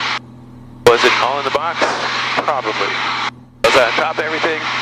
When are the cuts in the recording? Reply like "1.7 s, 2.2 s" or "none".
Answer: 3.4 s